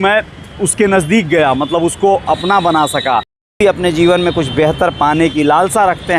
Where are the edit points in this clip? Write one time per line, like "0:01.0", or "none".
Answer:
0:03.6